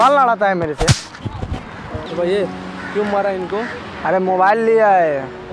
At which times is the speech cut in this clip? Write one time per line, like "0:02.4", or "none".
0:02.1